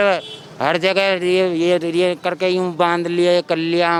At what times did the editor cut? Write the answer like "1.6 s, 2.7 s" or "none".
none